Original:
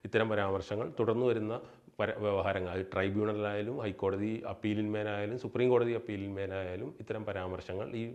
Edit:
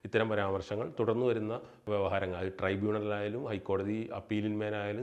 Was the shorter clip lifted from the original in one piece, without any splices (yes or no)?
no